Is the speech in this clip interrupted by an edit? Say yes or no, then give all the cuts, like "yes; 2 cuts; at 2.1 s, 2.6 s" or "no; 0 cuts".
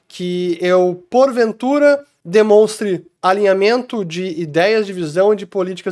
no; 0 cuts